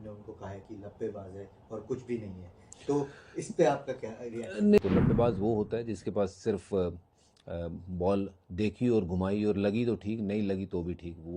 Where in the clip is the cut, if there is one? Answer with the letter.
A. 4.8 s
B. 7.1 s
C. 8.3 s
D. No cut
A